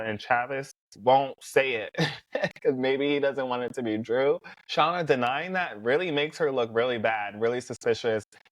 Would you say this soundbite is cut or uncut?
cut